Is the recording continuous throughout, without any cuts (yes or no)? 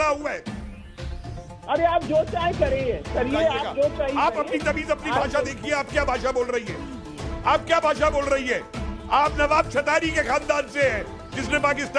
yes